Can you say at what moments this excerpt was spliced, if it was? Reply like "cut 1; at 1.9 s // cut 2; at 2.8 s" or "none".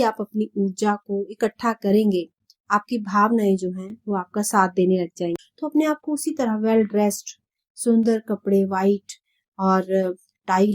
cut 1; at 5.4 s